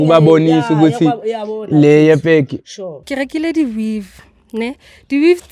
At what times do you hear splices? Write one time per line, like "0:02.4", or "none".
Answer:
0:03.0